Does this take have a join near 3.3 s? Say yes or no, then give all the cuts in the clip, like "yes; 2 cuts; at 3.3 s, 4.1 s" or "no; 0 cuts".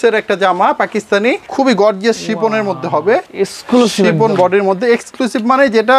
yes; 2 cuts; at 1.4 s, 3.3 s